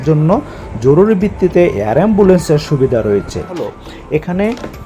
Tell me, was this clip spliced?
yes; 1 cut; at 3.7 s

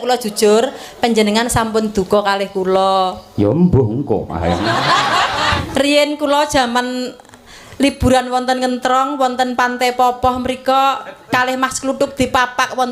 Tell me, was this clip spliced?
yes; 1 cut; at 5.6 s

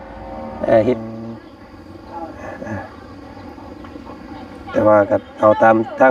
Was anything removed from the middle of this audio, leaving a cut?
yes; 1 cut; at 1.0 s

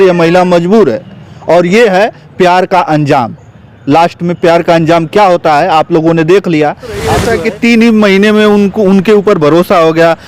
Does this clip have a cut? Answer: yes; 1 cut; at 7.2 s

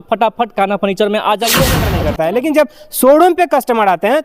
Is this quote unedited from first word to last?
no; 1 cut; at 1.9 s

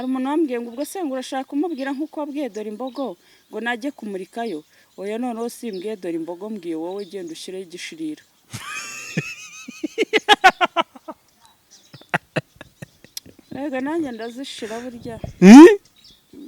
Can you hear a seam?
no; 0 cuts

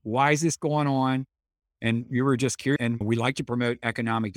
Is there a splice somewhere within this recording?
no; 0 cuts

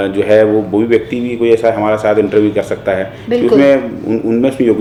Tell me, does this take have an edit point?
no; 0 cuts

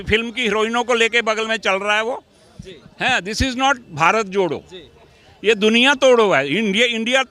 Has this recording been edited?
no; 0 cuts

